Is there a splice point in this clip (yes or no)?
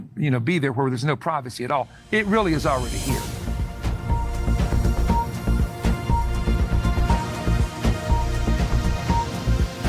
yes